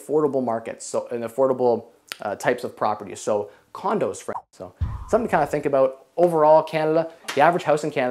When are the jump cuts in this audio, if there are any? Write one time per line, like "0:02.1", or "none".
0:04.3
0:07.2